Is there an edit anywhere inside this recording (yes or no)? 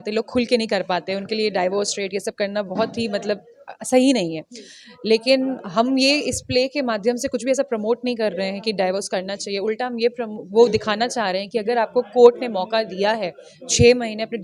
no